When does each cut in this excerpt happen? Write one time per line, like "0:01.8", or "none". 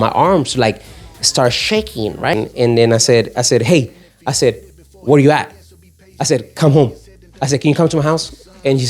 0:02.3